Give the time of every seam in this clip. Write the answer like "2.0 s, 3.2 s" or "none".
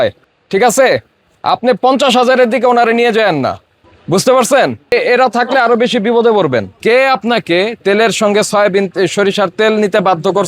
4.9 s, 6.7 s, 7.8 s